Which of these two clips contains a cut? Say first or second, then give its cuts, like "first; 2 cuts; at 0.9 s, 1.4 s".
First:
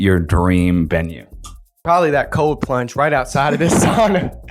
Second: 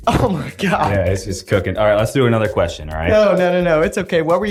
first; 1 cut; at 1.8 s